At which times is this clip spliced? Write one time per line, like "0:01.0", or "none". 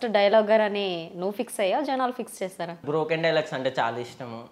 0:02.8